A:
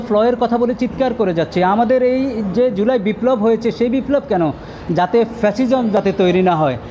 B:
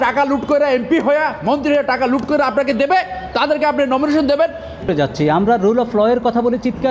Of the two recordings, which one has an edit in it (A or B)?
B